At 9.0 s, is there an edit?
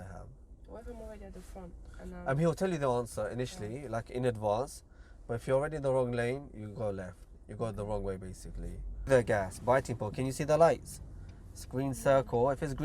yes; 1 cut; at 9.0 s

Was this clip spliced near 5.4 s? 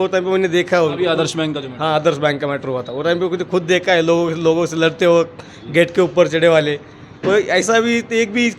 no; 0 cuts

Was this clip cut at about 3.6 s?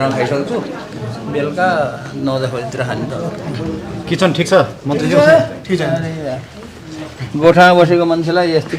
no; 0 cuts

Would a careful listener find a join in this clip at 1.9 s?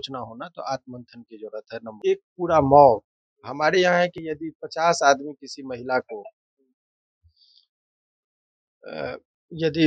yes; 1 cut; at 1.9 s

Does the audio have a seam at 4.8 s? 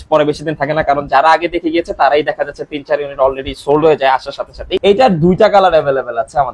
yes; 1 cut; at 4.8 s

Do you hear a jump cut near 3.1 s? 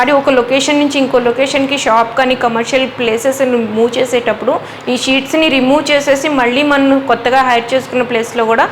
no; 0 cuts

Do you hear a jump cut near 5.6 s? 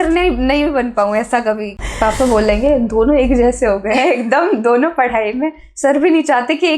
no; 1 cut; at 1.7 s

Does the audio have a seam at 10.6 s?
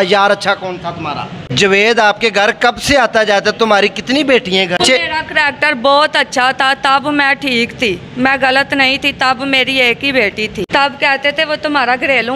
yes; 3 cuts; at 1.5 s, 4.8 s, 10.6 s

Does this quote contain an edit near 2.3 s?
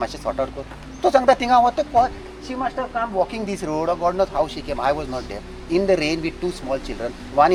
no; 0 cuts

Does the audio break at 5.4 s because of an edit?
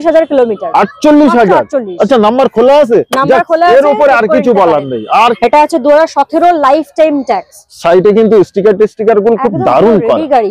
yes; 1 cut; at 5.4 s

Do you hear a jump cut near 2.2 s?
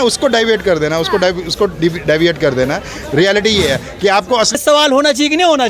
no; 1 cut; at 4.6 s

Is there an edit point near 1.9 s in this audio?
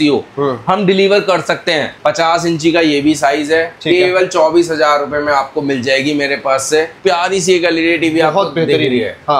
yes; 2 cuts; at 1.9 s, 6.9 s

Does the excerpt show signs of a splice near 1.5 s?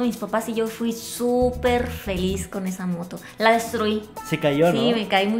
no; 0 cuts

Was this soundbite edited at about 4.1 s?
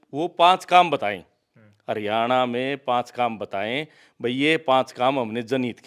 no; 0 cuts

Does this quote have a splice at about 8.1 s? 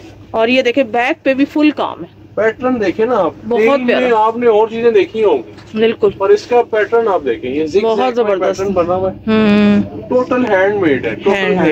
no; 0 cuts

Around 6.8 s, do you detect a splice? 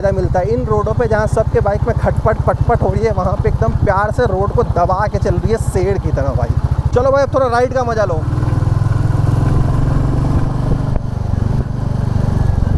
no; 0 cuts

